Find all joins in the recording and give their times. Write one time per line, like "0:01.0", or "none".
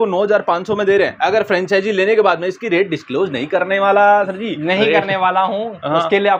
none